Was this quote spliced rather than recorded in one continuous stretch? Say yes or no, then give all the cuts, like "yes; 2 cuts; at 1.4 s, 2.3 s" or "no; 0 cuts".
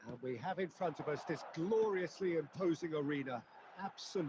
yes; 1 cut; at 1.0 s